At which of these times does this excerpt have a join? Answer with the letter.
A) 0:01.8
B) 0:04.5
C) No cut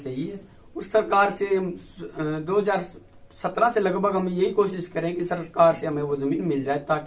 C